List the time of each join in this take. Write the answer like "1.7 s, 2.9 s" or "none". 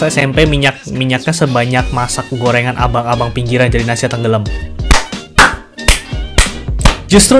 none

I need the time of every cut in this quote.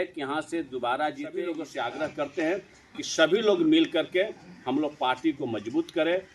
1.5 s

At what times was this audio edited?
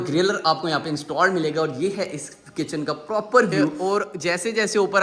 3.8 s

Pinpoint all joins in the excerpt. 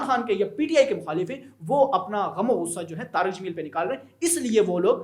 none

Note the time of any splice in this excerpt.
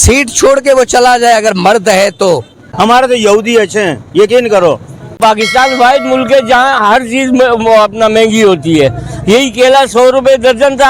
2.6 s, 5.2 s

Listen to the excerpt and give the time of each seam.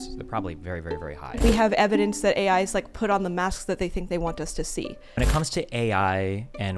1.4 s, 5.2 s

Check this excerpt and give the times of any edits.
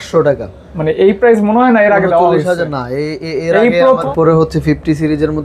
4.1 s

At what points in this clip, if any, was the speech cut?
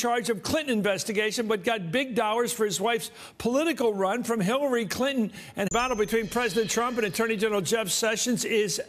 none

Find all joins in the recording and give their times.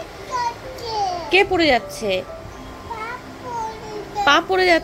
none

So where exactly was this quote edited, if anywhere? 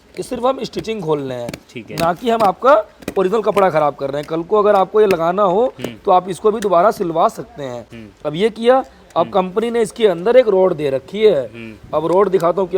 none

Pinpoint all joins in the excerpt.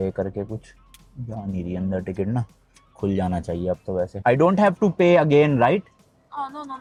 none

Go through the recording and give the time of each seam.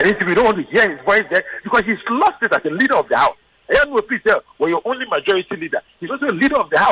none

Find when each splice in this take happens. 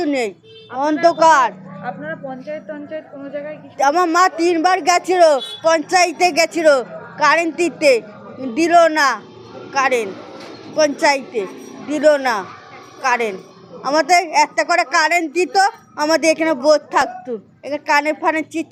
none

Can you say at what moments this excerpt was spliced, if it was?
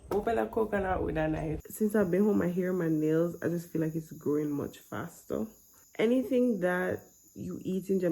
1.5 s, 5.7 s

